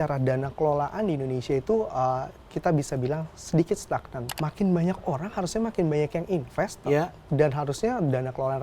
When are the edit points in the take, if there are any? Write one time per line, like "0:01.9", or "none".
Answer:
0:04.2